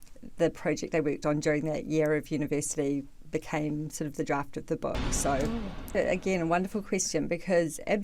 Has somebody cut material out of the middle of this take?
yes; 1 cut; at 5.9 s

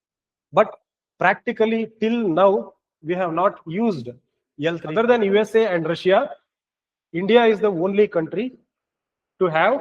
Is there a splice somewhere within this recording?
yes; 1 cut; at 4.8 s

